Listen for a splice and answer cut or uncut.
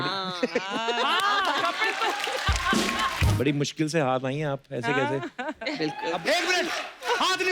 cut